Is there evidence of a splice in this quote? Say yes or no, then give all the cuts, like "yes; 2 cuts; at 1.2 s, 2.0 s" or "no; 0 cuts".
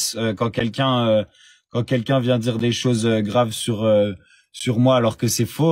no; 0 cuts